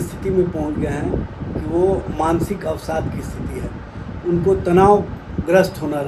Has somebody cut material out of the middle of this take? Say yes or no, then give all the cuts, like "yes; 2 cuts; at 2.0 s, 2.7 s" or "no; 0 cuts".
no; 0 cuts